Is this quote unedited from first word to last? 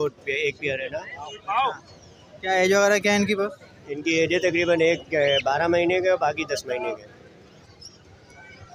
yes; 0 cuts

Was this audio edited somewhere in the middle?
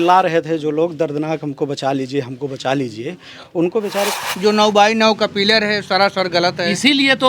yes; 1 cut; at 4.1 s

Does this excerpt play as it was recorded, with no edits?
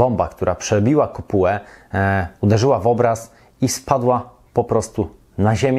yes; 0 cuts

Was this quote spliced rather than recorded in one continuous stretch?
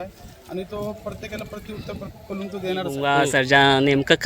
yes; 1 cut; at 2.9 s

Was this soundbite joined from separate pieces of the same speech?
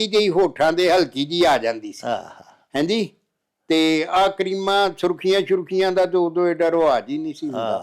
no; 0 cuts

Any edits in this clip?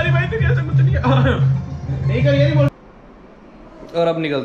yes; 1 cut; at 2.7 s

